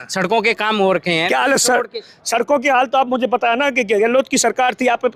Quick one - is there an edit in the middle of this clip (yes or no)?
no